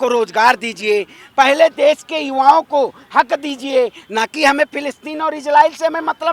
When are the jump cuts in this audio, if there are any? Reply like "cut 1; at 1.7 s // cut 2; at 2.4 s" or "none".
none